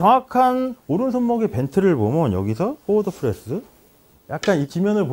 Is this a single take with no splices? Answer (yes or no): yes